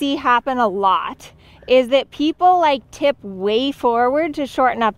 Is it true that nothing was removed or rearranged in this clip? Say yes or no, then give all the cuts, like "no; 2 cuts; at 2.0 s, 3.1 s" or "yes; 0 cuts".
yes; 0 cuts